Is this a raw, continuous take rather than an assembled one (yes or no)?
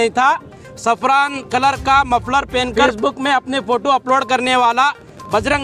no